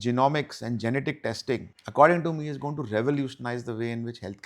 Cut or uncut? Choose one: cut